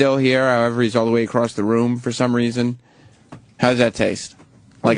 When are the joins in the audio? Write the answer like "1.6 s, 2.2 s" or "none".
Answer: none